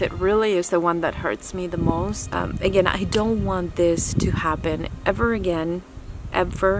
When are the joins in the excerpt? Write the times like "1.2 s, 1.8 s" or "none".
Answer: 2.2 s